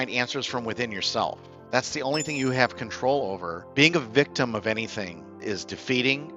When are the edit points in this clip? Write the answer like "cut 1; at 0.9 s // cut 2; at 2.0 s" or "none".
cut 1; at 3.6 s // cut 2; at 5.4 s